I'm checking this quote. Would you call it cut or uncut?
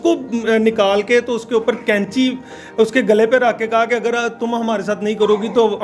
uncut